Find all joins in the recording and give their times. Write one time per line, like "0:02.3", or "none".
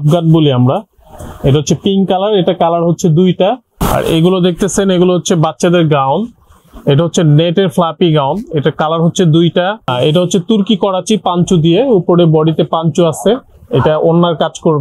0:03.7
0:09.9